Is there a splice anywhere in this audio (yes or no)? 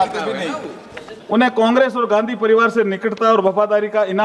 yes